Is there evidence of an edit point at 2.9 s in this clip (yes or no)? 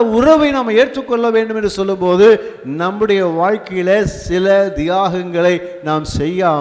no